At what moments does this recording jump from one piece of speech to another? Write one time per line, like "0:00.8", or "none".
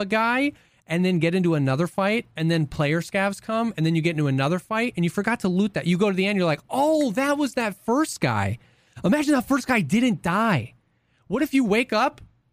none